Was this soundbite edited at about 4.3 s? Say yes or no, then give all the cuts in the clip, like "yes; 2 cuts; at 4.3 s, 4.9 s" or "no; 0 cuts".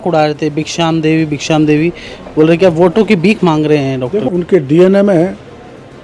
yes; 1 cut; at 4.3 s